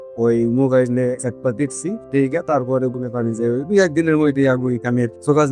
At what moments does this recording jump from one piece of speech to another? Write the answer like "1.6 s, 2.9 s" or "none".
none